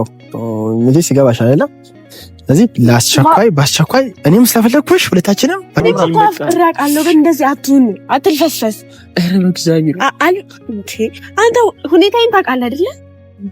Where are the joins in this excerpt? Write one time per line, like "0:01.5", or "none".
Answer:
0:05.8